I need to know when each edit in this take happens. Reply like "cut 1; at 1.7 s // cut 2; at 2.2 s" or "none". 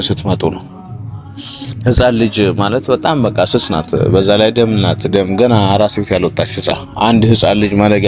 cut 1; at 6.7 s